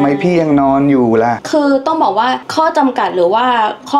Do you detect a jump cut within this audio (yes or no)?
yes